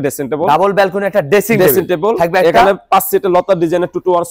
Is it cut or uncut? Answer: uncut